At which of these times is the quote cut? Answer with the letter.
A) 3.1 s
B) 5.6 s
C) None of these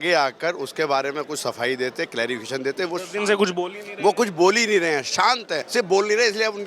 B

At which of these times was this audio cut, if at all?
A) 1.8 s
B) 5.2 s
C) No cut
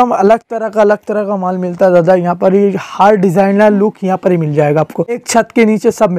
B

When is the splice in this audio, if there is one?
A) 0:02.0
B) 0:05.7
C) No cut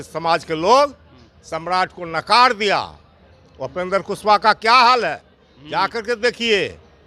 C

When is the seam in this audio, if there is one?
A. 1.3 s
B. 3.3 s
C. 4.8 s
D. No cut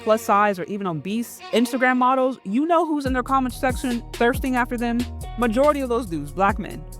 A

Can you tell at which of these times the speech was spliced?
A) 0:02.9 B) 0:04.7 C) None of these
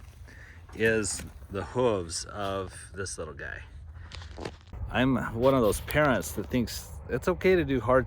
B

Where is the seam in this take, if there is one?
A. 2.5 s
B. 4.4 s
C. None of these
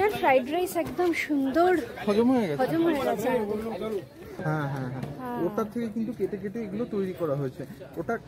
B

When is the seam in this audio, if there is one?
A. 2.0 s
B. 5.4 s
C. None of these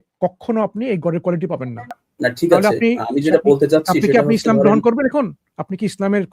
A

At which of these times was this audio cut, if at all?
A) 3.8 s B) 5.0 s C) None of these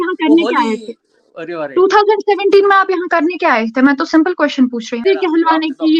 B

